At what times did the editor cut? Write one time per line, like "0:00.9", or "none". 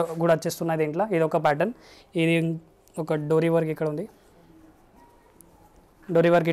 none